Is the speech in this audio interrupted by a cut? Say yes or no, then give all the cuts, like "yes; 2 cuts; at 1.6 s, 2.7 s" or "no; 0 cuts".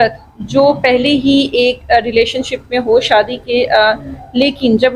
no; 0 cuts